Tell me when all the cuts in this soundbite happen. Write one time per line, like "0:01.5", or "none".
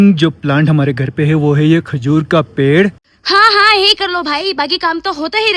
0:03.1

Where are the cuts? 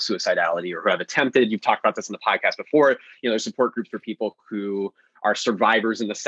none

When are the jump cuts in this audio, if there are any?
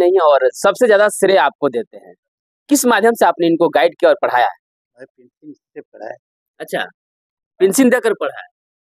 none

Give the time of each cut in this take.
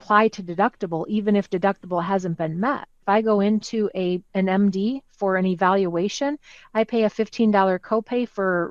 0:03.0
0:04.3

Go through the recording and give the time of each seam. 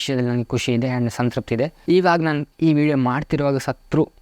0:01.8

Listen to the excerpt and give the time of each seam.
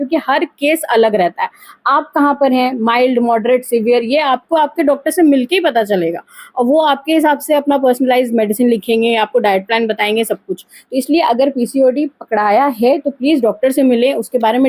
none

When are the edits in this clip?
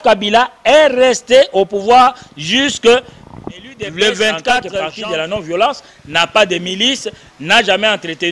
0:04.9

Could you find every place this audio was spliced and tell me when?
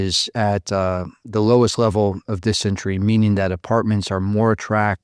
none

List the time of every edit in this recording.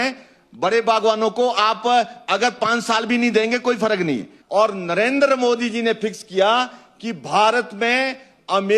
0:04.3

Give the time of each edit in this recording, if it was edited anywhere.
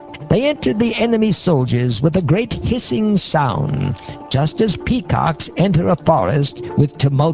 none

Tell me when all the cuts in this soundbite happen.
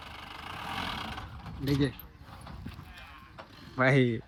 none

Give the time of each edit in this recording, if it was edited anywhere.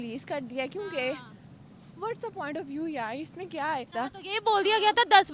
0:03.9

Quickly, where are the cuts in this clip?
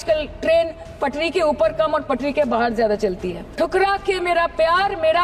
0:03.4

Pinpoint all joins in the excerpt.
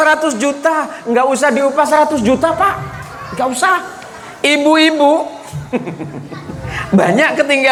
none

